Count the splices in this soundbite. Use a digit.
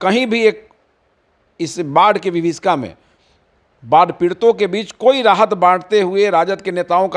0